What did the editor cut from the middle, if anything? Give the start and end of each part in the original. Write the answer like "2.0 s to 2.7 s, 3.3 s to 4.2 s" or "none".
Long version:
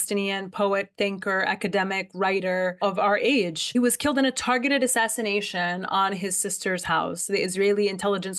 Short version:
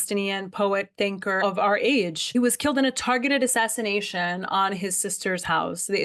1.4 s to 2.8 s